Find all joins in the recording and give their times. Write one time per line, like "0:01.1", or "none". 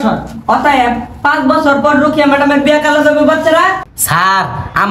0:03.9